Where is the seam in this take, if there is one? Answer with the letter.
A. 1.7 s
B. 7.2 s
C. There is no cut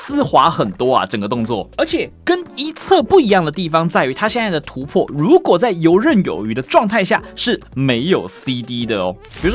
C